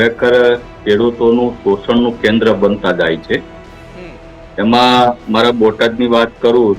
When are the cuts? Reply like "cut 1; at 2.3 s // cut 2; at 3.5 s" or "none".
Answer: none